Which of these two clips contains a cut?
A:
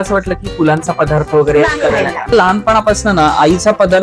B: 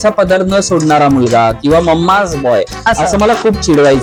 A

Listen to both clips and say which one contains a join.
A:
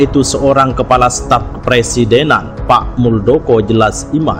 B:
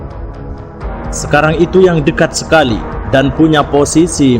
B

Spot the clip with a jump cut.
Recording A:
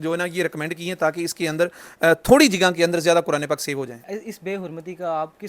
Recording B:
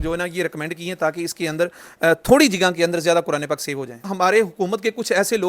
B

